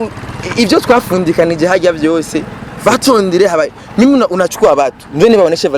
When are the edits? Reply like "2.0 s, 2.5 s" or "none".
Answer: none